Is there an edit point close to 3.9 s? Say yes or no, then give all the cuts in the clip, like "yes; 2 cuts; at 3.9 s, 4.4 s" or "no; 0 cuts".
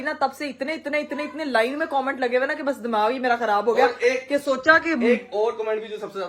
no; 0 cuts